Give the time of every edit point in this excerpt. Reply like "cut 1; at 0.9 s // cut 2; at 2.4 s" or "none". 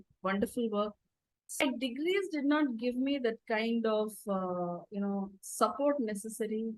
cut 1; at 1.6 s